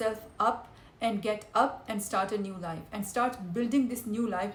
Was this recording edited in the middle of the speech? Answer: no; 0 cuts

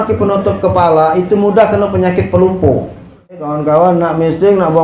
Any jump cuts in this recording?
yes; 1 cut; at 3.5 s

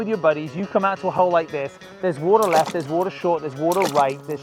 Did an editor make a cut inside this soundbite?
no; 0 cuts

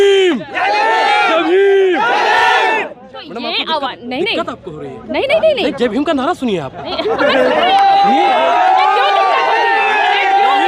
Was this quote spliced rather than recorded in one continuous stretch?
no; 0 cuts

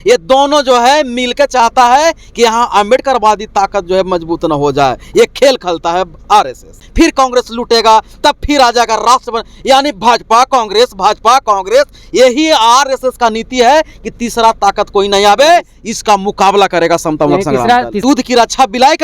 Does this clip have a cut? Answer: yes; 2 cuts; at 6.8 s, 18.0 s

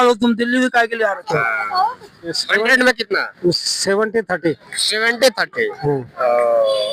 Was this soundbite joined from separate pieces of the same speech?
yes; 1 cut; at 2.4 s

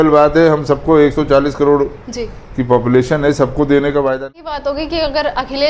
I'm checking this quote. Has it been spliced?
yes; 1 cut; at 4.3 s

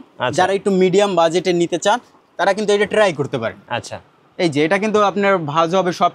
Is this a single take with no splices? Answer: yes; 0 cuts

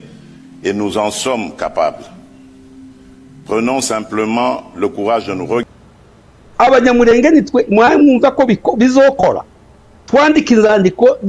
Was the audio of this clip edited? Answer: yes; 1 cut; at 5.6 s

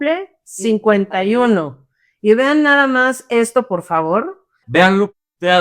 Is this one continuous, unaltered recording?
no; 1 cut; at 4.5 s

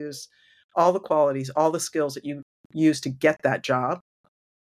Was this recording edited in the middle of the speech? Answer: no; 0 cuts

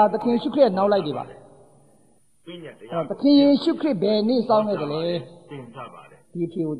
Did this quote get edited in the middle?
no; 0 cuts

